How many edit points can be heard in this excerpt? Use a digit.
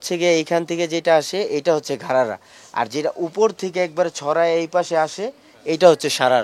0